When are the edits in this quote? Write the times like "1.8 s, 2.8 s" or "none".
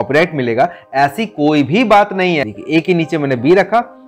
2.5 s